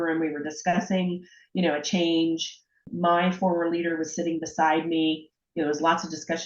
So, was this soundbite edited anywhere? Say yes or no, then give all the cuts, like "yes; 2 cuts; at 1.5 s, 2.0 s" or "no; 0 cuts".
yes; 1 cut; at 2.8 s